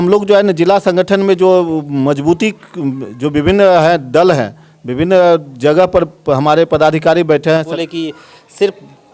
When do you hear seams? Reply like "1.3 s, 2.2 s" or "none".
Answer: 7.7 s